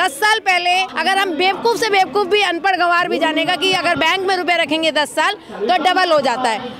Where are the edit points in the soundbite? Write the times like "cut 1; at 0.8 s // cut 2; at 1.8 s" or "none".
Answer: cut 1; at 0.9 s